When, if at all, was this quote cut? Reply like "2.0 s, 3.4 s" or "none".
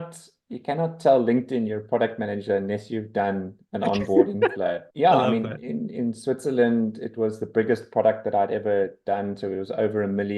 4.9 s, 5.7 s

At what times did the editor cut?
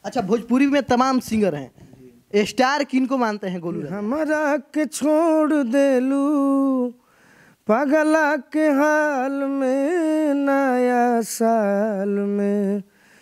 4.0 s

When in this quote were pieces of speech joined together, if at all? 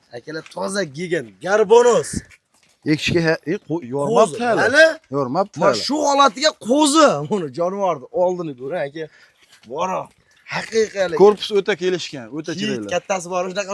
none

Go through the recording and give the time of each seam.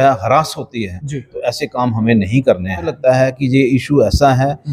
2.9 s

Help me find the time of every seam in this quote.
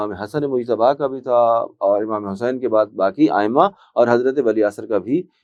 none

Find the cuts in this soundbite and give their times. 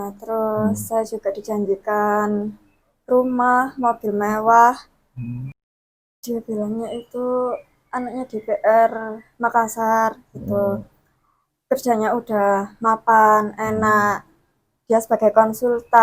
5.6 s

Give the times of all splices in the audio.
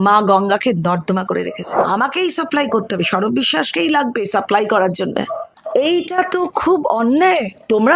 1.7 s

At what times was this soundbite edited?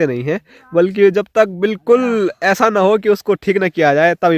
none

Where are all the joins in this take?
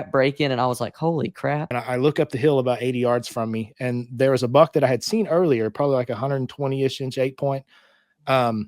1.7 s

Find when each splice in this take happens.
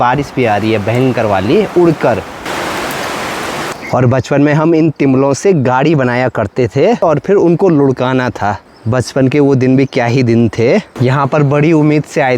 2.4 s, 3.8 s, 7.0 s, 8.7 s, 10.9 s

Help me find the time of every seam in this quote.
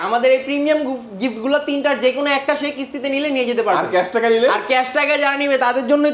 none

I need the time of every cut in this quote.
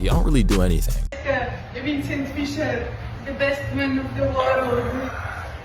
0.9 s

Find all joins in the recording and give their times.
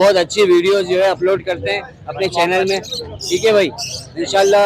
none

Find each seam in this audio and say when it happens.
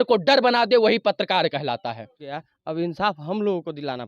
2.3 s

